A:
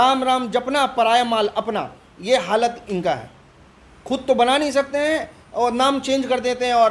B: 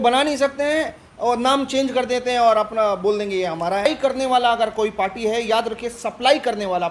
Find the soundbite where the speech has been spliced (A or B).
B